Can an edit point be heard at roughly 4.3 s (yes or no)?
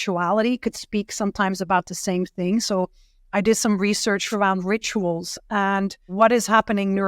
yes